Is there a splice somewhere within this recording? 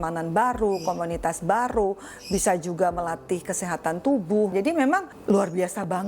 yes; 1 cut; at 4.6 s

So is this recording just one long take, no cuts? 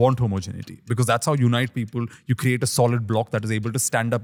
yes; 0 cuts

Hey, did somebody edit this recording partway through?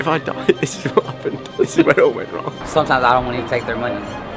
yes; 1 cut; at 2.7 s

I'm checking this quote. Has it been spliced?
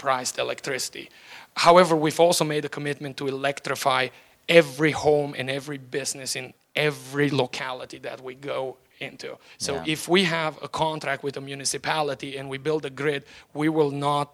no; 0 cuts

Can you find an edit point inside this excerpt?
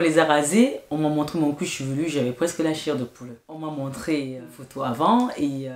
yes; 1 cut; at 3.5 s

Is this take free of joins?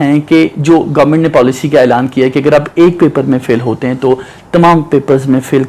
yes; 0 cuts

